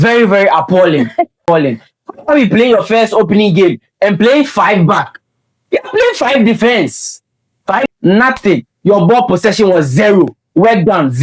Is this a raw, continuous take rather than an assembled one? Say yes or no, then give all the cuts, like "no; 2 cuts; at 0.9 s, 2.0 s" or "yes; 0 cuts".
no; 2 cuts; at 1.4 s, 7.9 s